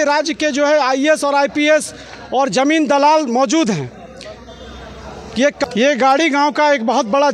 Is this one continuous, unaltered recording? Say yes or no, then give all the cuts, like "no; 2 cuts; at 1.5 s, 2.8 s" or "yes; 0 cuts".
no; 1 cut; at 5.6 s